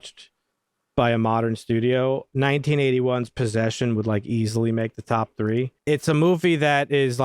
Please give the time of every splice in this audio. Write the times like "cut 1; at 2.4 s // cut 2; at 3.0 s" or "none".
cut 1; at 5.8 s